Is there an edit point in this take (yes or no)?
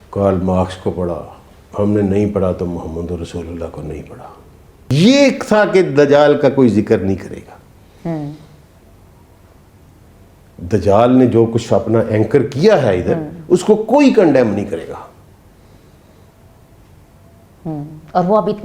yes